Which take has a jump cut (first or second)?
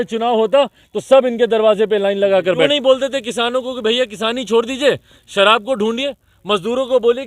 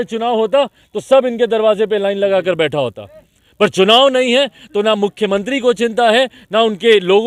first